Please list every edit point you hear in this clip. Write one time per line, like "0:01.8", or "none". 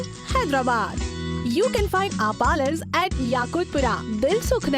0:01.4